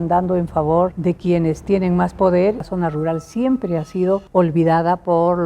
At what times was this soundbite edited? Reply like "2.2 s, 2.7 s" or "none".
1.0 s, 2.7 s, 4.3 s